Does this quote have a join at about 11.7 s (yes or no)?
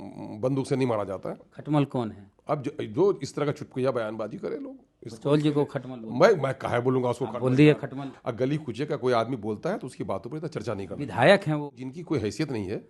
yes